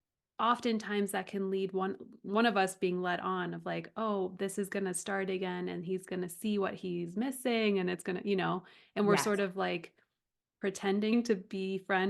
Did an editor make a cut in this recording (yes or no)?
yes